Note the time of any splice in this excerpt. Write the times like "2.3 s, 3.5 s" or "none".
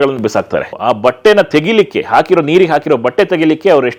none